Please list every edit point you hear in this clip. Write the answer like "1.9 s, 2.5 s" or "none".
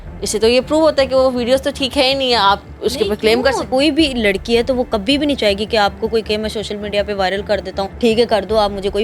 3.7 s, 7.9 s